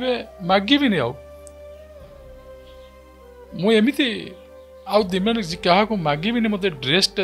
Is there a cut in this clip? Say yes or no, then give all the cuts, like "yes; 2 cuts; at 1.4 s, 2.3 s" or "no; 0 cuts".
no; 0 cuts